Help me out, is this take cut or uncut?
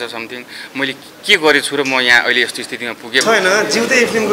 cut